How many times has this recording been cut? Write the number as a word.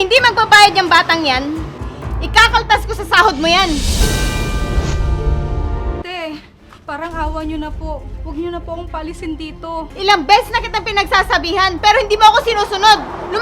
two